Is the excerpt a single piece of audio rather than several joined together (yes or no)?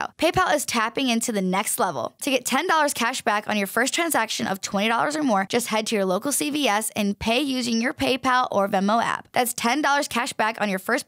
yes